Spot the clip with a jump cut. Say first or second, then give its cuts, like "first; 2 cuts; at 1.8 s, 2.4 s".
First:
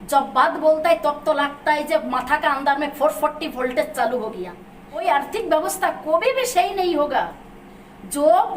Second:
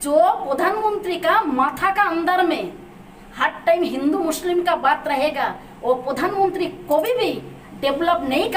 first; 1 cut; at 5.0 s